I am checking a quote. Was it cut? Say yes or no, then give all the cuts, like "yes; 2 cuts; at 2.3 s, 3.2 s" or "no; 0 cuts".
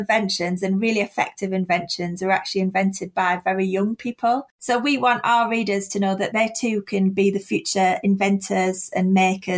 yes; 2 cuts; at 4.5 s, 6.3 s